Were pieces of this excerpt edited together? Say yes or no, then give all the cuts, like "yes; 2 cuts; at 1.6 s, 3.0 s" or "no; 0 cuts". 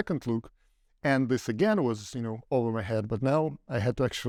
no; 0 cuts